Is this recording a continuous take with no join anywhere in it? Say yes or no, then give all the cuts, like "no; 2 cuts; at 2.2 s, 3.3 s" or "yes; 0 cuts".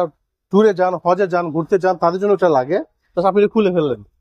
no; 1 cut; at 3.0 s